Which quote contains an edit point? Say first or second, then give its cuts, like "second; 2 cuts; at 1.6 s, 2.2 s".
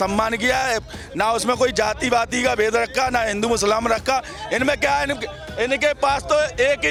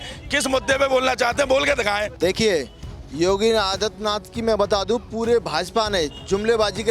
second; 1 cut; at 2.1 s